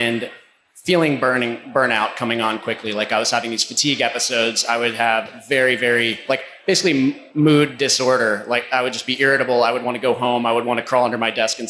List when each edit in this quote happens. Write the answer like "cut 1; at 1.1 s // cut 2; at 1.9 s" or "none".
cut 1; at 7.2 s